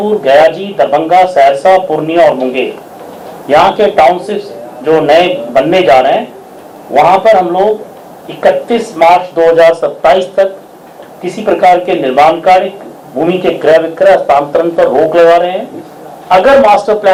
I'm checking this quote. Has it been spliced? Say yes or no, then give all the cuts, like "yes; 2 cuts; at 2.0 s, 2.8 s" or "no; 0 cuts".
no; 0 cuts